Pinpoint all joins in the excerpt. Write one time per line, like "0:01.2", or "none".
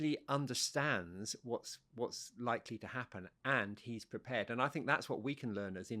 none